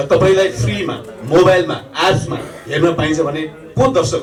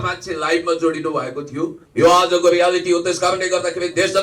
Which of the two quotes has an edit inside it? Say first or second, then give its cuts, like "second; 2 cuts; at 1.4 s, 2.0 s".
second; 1 cut; at 1.8 s